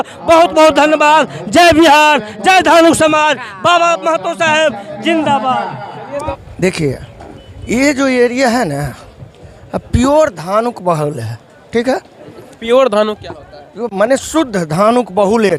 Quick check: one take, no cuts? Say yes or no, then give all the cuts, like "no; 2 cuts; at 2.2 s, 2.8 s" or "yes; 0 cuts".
yes; 0 cuts